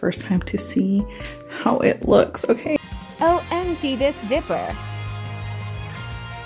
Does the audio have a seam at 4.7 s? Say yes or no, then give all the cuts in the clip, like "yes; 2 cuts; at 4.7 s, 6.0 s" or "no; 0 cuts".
no; 1 cut; at 2.8 s